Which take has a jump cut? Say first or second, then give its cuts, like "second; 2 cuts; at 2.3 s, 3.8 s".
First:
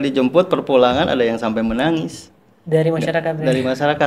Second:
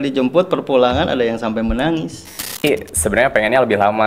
second; 1 cut; at 2.6 s